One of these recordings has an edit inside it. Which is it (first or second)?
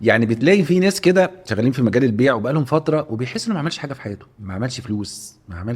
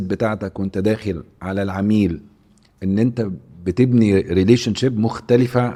first